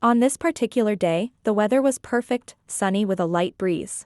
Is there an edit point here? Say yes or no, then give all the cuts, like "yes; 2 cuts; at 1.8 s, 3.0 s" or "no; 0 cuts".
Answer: yes; 1 cut; at 2.6 s